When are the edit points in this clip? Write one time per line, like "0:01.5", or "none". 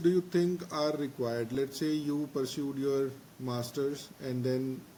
none

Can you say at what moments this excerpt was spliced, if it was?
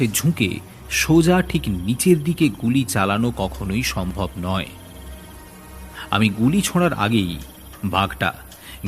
0:04.7
0:06.1

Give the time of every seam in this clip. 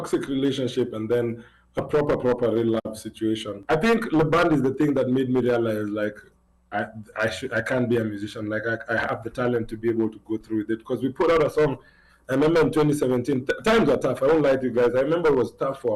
0:03.5

